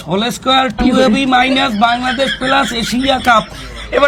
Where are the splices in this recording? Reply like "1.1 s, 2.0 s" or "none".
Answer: none